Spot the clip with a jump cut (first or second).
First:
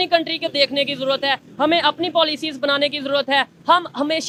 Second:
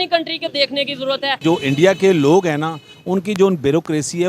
second